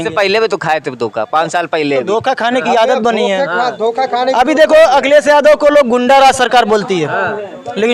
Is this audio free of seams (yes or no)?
yes